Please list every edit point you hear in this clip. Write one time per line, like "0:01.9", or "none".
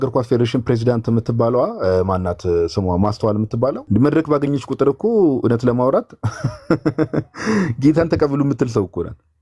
0:03.8